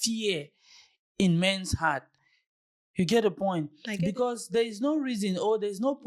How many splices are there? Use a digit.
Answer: 0